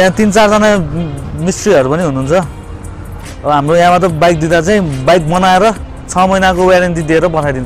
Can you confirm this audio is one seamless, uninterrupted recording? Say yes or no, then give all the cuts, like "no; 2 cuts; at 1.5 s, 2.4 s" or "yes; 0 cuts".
yes; 0 cuts